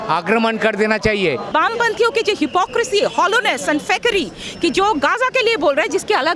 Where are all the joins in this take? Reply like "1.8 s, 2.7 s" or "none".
1.5 s